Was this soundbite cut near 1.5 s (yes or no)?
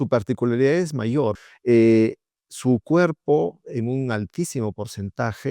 yes